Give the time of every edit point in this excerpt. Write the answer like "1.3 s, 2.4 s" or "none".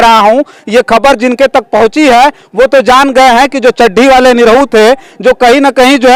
none